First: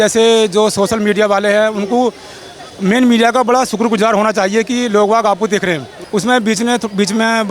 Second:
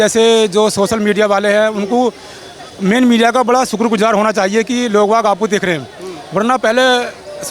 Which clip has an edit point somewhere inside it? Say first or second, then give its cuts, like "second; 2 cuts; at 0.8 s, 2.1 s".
first; 1 cut; at 5.9 s